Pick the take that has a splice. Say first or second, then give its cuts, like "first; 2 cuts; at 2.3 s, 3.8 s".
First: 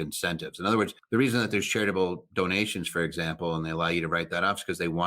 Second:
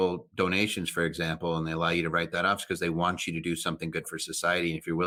first; 1 cut; at 1.0 s